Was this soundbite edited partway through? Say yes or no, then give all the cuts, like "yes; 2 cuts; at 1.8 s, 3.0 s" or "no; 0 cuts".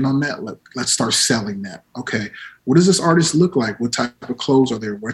no; 0 cuts